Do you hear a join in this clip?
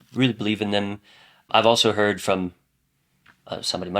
yes; 1 cut; at 1.5 s

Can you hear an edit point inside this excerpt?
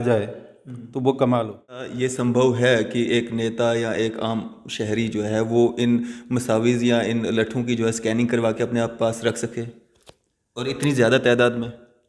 yes; 1 cut; at 1.9 s

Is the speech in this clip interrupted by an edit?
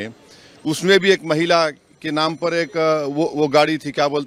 no; 0 cuts

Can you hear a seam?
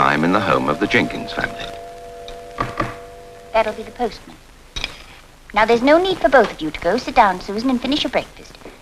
no; 0 cuts

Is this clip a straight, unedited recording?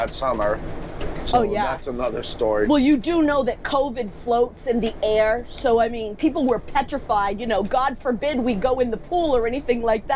yes; 0 cuts

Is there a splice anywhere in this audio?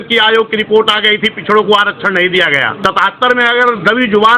yes; 1 cut; at 2.7 s

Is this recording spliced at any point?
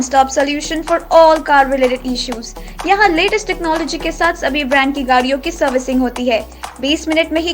no; 0 cuts

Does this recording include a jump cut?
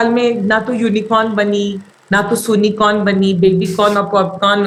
no; 0 cuts

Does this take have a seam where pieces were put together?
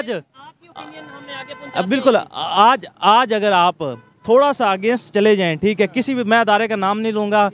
no; 0 cuts

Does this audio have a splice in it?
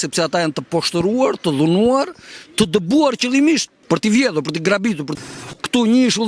yes; 2 cuts; at 3.7 s, 5.1 s

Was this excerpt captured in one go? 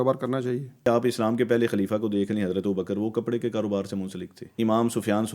no; 2 cuts; at 0.9 s, 4.5 s

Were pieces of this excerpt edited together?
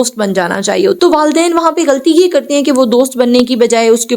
yes; 1 cut; at 1.0 s

